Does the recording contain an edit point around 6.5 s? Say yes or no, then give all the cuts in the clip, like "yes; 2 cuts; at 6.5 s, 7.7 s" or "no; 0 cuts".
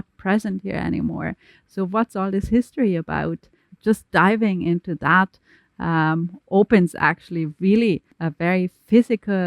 no; 2 cuts; at 3.6 s, 8.2 s